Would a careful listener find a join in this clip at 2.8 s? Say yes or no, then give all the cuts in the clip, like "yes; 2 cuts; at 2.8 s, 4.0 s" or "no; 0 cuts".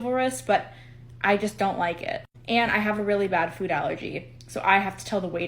yes; 1 cut; at 2.8 s